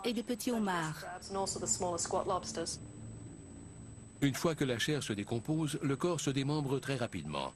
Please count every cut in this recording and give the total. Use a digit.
1